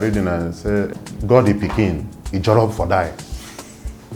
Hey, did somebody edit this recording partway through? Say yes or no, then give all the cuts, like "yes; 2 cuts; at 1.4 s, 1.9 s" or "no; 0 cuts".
yes; 1 cut; at 0.9 s